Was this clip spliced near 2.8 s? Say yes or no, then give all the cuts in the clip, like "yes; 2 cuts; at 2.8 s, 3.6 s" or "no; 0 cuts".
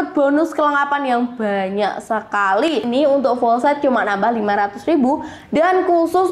yes; 1 cut; at 2.8 s